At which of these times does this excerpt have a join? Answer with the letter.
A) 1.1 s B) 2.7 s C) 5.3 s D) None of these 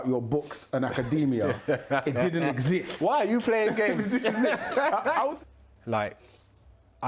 C